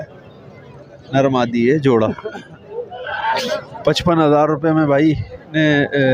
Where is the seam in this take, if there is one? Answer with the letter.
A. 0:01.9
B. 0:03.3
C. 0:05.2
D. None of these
B